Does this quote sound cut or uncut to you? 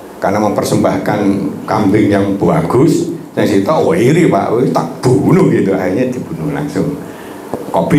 uncut